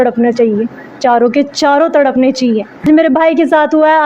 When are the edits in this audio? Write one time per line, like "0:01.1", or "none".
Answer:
0:02.8